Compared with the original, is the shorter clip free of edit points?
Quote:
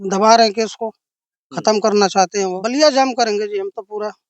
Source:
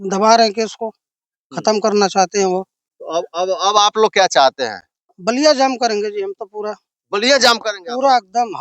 no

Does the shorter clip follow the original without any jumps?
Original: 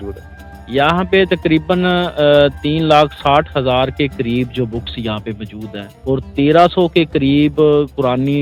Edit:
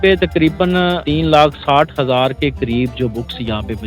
no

